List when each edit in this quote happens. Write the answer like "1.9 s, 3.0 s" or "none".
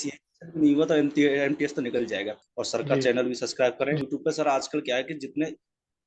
2.3 s, 4.0 s